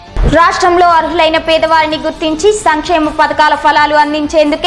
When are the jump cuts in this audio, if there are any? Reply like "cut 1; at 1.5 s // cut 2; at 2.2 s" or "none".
none